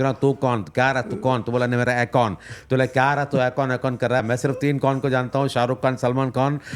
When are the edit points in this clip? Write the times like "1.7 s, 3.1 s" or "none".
4.2 s